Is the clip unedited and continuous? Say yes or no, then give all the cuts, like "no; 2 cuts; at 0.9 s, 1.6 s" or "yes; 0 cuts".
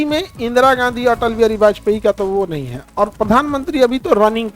yes; 0 cuts